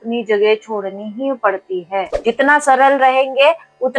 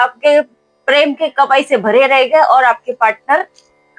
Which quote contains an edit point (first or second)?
first